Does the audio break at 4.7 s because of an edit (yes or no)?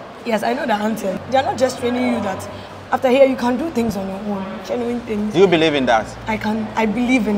no